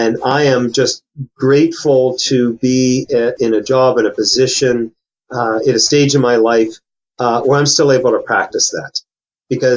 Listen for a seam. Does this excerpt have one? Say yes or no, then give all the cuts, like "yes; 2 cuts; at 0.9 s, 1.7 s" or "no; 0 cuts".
yes; 1 cut; at 3.3 s